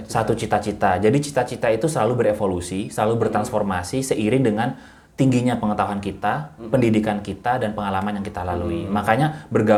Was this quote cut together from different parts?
no; 0 cuts

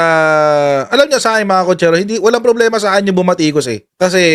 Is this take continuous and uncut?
yes; 0 cuts

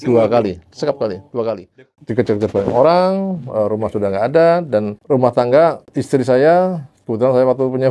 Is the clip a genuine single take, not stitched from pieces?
no; 3 cuts; at 1.7 s, 4.9 s, 5.9 s

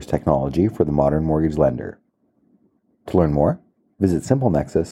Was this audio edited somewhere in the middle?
no; 0 cuts

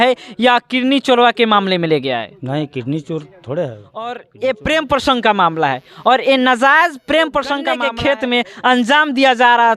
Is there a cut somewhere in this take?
yes; 2 cuts; at 4.2 s, 7.7 s

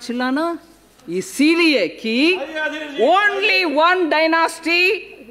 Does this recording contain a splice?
no; 0 cuts

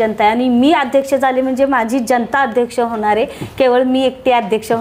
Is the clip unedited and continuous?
yes; 0 cuts

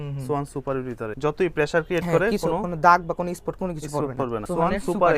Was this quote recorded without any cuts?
no; 2 cuts; at 1.2 s, 4.4 s

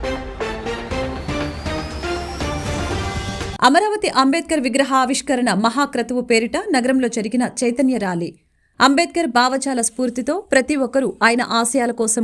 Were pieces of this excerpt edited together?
yes; 1 cut; at 3.5 s

